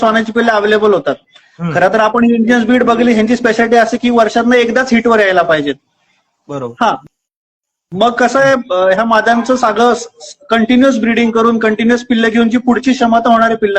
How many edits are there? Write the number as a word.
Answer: zero